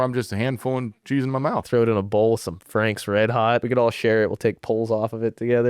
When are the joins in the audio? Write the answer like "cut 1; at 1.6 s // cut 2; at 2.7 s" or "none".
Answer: cut 1; at 1.6 s // cut 2; at 3.6 s